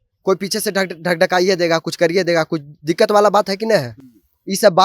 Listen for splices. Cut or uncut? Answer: uncut